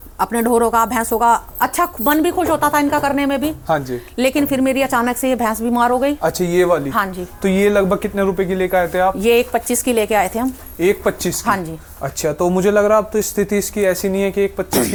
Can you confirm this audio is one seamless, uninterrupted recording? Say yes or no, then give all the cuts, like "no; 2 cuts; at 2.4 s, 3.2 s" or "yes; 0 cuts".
yes; 0 cuts